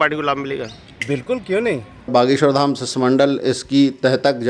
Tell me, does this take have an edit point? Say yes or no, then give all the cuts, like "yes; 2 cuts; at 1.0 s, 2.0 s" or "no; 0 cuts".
yes; 1 cut; at 2.1 s